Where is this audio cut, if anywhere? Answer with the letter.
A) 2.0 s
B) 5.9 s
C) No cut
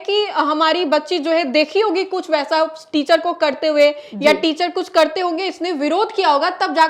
C